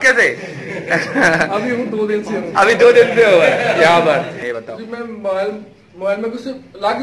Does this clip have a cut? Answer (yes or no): yes